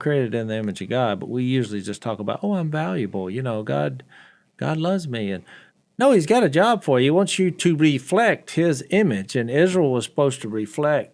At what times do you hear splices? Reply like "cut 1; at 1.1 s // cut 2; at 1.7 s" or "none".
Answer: none